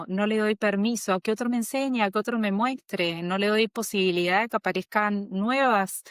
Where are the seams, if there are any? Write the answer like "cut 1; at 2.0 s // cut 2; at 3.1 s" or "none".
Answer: none